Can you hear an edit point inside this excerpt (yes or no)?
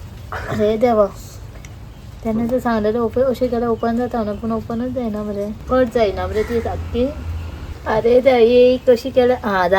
no